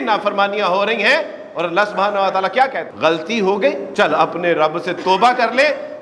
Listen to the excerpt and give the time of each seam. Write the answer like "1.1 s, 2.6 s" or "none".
2.9 s, 3.8 s